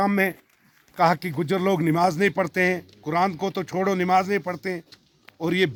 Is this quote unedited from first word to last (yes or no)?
yes